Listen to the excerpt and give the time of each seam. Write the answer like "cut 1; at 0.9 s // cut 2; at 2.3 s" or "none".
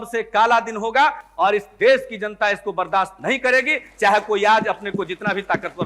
none